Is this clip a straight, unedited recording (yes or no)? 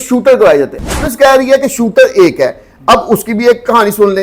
no